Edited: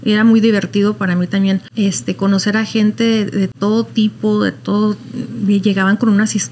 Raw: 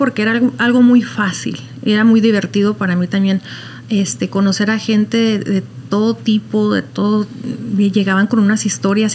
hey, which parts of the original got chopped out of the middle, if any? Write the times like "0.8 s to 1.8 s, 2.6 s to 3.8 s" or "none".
3.5 s to 3.8 s, 5.7 s to 5.8 s